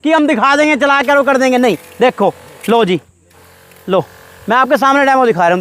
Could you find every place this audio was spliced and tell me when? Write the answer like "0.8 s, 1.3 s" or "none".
none